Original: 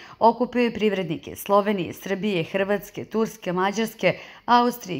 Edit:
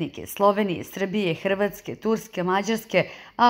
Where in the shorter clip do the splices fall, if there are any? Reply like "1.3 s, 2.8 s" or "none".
none